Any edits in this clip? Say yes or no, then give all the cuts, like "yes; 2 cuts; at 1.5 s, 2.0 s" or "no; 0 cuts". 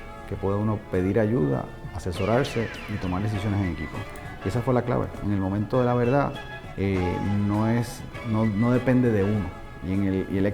no; 0 cuts